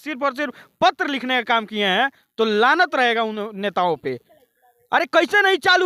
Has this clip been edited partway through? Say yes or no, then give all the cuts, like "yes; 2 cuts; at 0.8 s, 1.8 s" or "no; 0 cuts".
no; 0 cuts